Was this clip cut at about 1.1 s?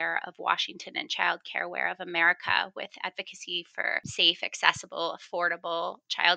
no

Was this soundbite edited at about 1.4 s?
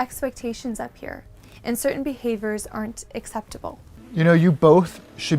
no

